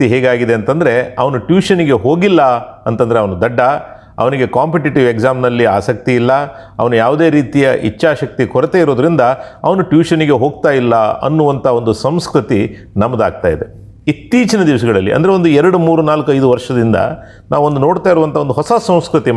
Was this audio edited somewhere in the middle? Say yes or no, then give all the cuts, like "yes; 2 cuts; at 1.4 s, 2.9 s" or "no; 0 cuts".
yes; 1 cut; at 13.9 s